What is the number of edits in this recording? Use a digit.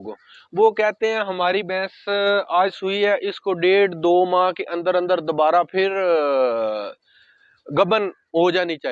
0